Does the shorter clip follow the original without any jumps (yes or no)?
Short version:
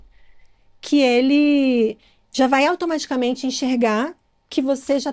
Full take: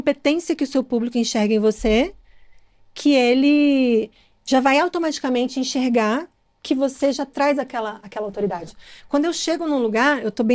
yes